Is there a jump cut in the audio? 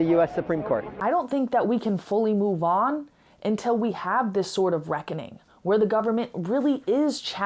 yes; 1 cut; at 0.9 s

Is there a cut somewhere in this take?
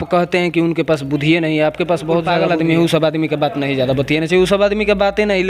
yes; 1 cut; at 2.3 s

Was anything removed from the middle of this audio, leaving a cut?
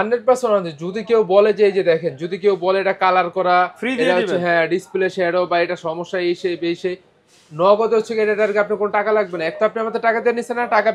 no; 0 cuts

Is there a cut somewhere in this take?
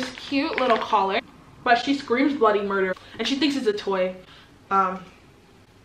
yes; 2 cuts; at 1.2 s, 3.0 s

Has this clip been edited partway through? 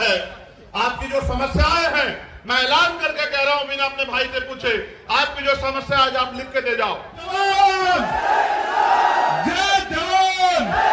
yes; 1 cut; at 7.3 s

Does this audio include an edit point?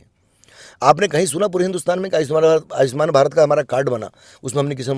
no; 0 cuts

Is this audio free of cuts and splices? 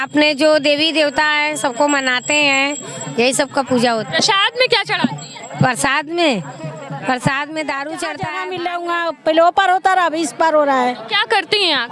no; 1 cut; at 8.4 s

